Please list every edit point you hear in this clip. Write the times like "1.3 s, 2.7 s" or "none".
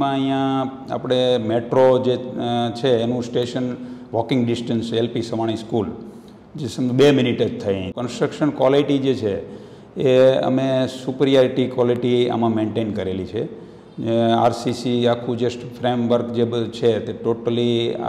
8.0 s